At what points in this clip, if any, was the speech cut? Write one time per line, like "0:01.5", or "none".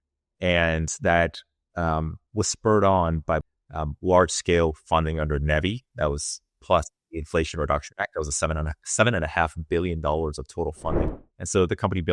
0:03.4
0:11.1